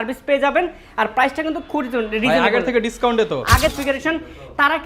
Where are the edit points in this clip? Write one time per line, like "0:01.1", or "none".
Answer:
0:03.7